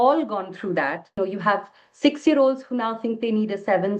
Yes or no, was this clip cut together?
yes